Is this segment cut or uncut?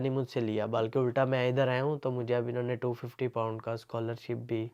uncut